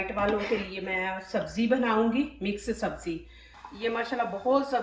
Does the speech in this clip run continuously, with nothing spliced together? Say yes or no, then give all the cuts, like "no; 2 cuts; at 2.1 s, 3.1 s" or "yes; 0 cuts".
no; 1 cut; at 3.6 s